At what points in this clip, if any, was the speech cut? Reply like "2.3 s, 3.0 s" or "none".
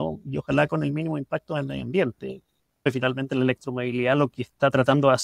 2.9 s

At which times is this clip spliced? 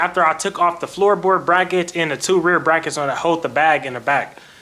none

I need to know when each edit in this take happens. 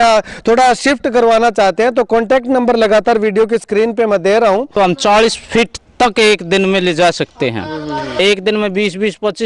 4.7 s, 8.2 s

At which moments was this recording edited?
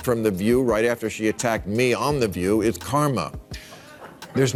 none

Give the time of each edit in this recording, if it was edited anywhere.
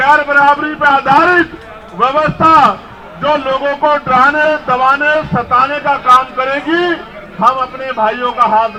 none

